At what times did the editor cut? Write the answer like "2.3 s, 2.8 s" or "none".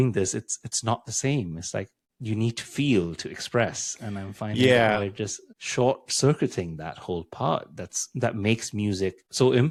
none